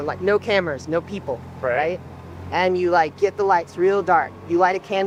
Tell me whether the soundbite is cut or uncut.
uncut